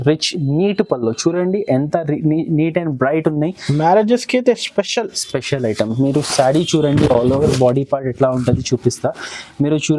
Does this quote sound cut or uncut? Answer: uncut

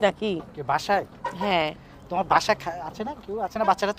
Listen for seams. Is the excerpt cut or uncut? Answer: uncut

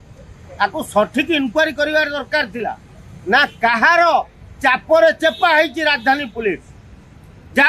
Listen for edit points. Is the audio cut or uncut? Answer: uncut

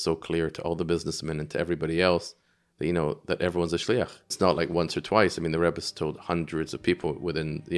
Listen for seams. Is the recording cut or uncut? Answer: cut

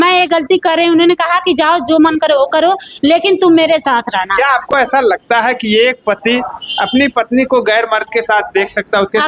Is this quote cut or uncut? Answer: uncut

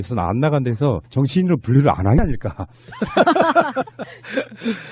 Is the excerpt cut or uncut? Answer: uncut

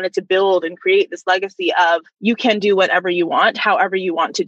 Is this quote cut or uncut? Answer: cut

